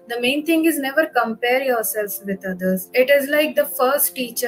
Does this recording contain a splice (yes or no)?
yes